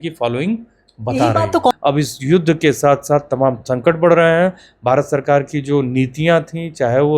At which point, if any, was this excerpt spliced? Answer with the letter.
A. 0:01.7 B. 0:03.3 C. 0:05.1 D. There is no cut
A